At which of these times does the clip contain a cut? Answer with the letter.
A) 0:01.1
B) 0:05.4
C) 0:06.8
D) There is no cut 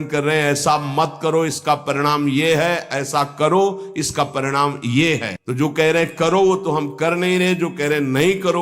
B